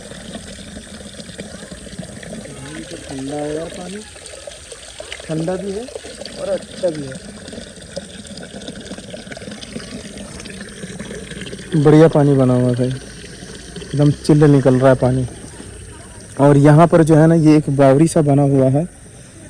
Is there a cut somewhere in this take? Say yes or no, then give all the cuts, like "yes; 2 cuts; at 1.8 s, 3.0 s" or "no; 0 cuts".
no; 0 cuts